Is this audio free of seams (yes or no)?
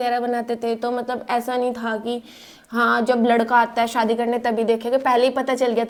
yes